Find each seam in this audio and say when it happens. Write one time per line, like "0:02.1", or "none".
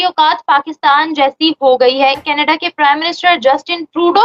0:02.3